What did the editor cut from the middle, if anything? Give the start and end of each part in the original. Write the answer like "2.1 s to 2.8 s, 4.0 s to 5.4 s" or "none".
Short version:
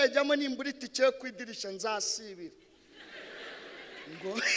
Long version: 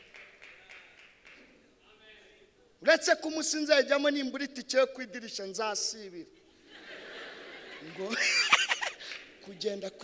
none